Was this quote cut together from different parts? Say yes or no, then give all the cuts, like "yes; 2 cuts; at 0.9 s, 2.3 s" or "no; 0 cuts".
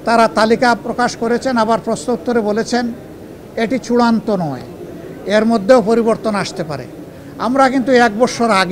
no; 0 cuts